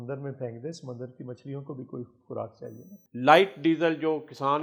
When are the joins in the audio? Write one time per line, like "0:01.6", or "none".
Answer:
0:02.9